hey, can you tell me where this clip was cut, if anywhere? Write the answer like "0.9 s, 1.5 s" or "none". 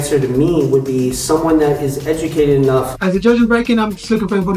2.9 s